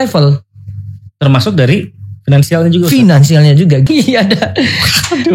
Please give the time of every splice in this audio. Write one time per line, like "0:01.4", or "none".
0:03.9